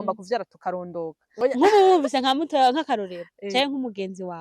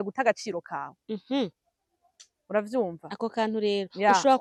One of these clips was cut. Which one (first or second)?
first